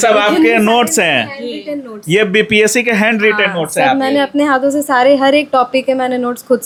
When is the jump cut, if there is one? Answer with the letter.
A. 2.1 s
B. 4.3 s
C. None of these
C